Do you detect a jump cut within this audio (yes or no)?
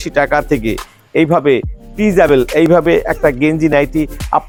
no